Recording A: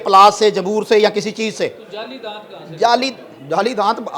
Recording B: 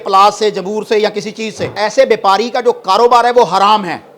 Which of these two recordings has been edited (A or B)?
B